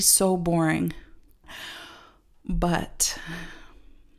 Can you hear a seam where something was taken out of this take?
yes; 1 cut; at 1.4 s

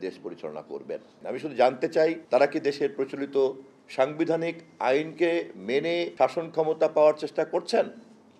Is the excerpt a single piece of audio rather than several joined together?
no; 3 cuts; at 1.2 s, 2.2 s, 6.1 s

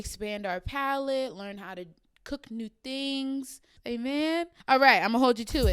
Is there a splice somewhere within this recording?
yes; 1 cut; at 4.6 s

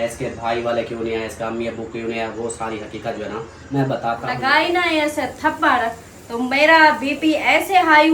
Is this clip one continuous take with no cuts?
no; 1 cut; at 4.3 s

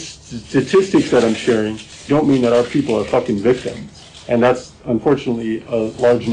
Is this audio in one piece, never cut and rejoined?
yes; 0 cuts

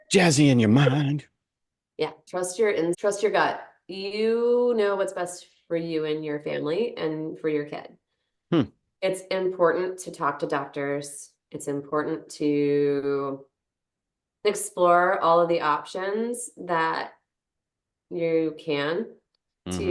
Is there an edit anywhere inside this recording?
yes; 2 cuts; at 2.2 s, 3.0 s

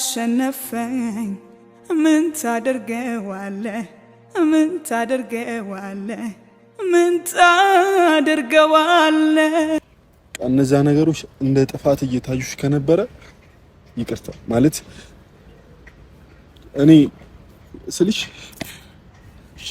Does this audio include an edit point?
yes; 1 cut; at 9.8 s

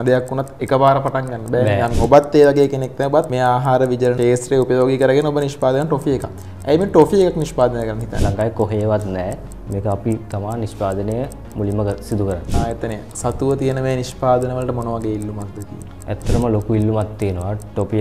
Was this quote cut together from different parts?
yes; 5 cuts; at 2.0 s, 3.3 s, 4.2 s, 8.1 s, 12.5 s

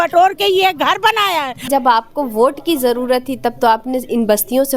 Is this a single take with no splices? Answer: no; 1 cut; at 1.7 s

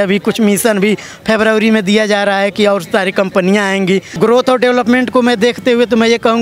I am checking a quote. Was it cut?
yes; 1 cut; at 4.1 s

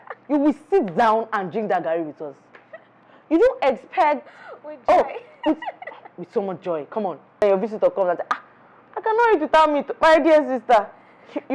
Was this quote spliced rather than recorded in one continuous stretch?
yes; 1 cut; at 7.4 s

